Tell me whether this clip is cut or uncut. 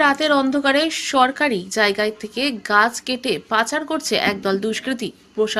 uncut